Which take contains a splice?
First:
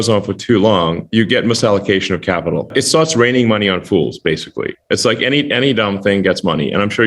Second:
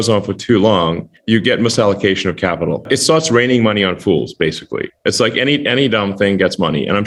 first; 1 cut; at 1.0 s

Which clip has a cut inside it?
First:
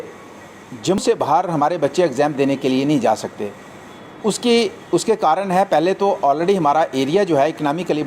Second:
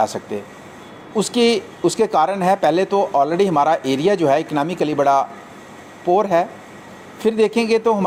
first; 1 cut; at 1.0 s

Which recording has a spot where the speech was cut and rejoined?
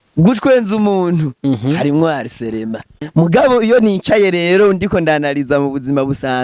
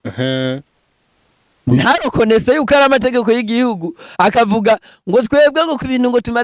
first; 1 cut; at 3.0 s

